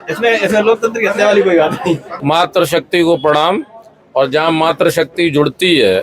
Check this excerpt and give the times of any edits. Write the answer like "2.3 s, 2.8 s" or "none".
2.1 s